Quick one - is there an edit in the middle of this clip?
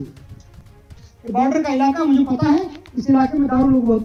no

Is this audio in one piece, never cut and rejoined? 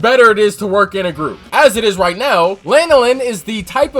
no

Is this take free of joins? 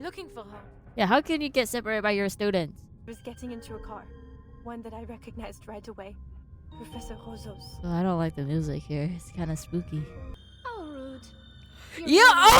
no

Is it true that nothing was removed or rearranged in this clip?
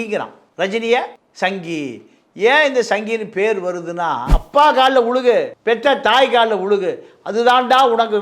no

